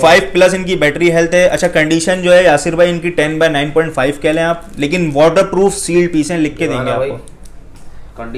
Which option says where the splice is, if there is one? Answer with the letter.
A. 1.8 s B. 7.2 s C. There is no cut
C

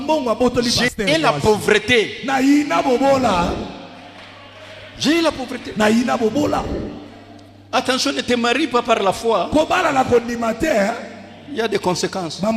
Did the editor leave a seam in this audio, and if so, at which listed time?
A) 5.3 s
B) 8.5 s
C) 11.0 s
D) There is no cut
D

